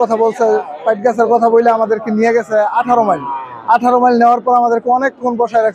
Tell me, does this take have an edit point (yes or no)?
no